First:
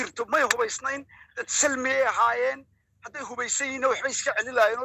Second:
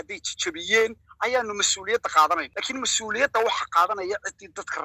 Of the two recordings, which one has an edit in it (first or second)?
second